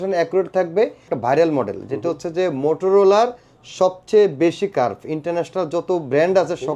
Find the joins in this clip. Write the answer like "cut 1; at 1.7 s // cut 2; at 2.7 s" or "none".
cut 1; at 1.1 s